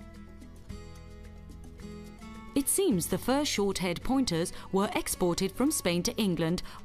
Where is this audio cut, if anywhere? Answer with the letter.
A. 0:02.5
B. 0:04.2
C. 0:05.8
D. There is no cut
A